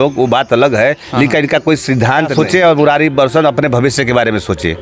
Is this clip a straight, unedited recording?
no; 1 cut; at 2.3 s

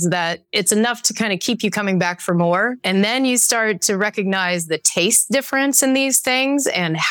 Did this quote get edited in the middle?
no; 0 cuts

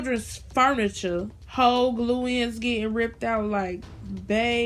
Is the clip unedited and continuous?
yes; 0 cuts

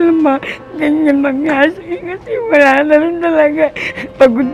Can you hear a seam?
no; 0 cuts

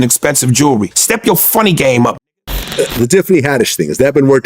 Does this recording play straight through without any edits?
no; 1 cut; at 2.2 s

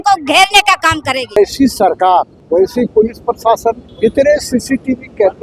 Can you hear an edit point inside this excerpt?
yes; 3 cuts; at 1.4 s, 2.4 s, 3.9 s

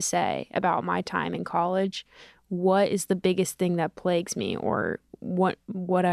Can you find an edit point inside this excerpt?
no; 0 cuts

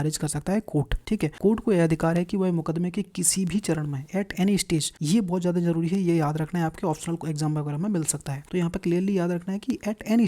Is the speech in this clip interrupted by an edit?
yes; 3 cuts; at 1.2 s, 4.9 s, 8.3 s

